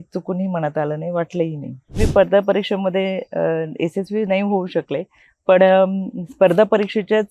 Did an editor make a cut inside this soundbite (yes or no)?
yes